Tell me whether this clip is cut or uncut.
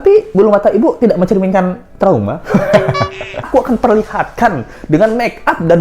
cut